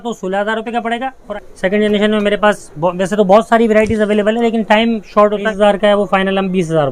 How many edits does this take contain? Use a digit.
2